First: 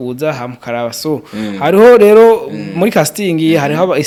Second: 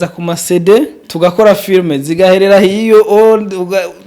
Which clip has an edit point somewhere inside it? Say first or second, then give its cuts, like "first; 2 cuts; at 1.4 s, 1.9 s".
second; 1 cut; at 1.0 s